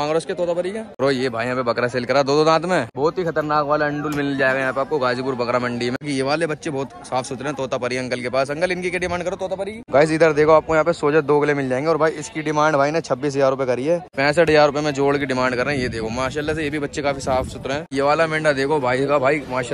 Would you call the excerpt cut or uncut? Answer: cut